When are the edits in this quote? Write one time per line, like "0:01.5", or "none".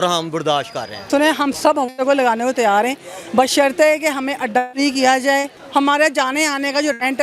0:01.1
0:05.6